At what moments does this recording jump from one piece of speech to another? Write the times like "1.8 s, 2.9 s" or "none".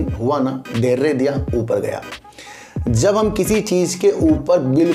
none